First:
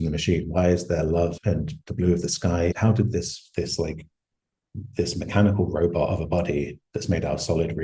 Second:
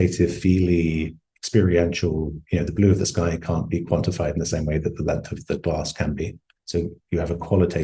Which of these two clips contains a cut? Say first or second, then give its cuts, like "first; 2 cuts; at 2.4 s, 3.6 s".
first; 2 cuts; at 1.3 s, 2.8 s